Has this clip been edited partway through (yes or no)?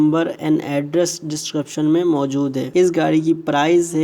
yes